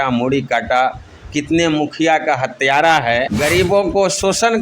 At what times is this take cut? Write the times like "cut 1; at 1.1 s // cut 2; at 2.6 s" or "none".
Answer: cut 1; at 3.3 s